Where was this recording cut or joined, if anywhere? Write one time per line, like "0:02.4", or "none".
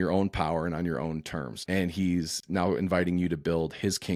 none